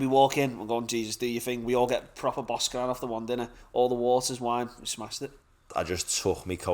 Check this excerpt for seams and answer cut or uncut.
cut